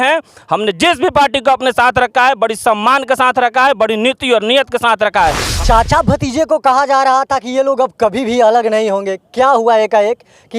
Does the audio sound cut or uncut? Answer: cut